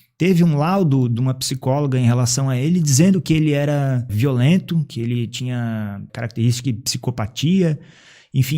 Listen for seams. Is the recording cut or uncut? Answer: cut